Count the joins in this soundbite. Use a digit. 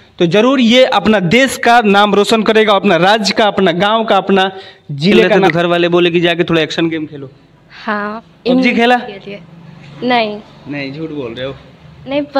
1